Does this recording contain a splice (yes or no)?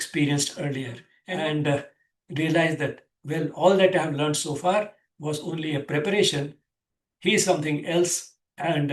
yes